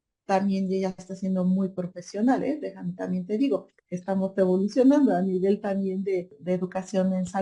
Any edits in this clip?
yes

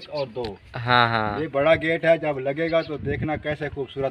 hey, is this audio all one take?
yes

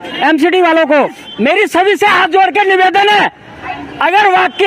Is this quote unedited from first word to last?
no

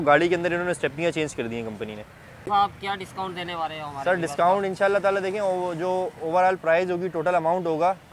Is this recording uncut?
no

